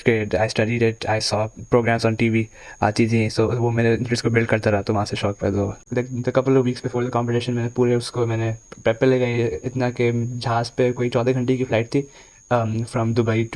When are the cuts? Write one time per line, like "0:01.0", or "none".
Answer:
0:05.8